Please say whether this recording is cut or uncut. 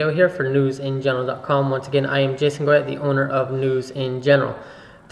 uncut